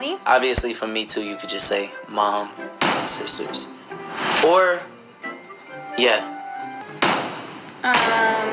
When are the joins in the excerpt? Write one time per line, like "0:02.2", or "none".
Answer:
0:06.9